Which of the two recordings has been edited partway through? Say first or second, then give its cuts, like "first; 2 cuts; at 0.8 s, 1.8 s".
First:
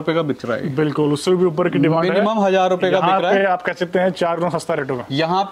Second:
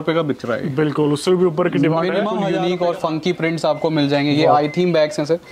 second; 1 cut; at 2.4 s